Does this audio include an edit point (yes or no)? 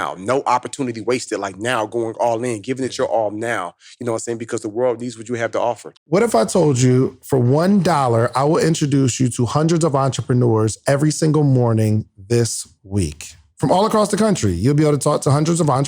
yes